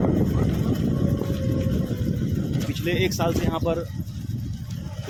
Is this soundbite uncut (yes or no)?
yes